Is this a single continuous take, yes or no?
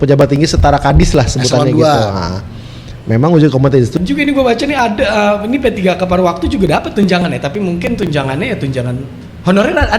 no